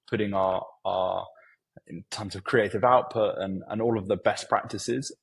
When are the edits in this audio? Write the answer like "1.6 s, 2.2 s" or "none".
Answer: none